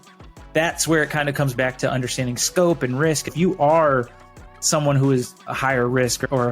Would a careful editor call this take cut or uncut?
cut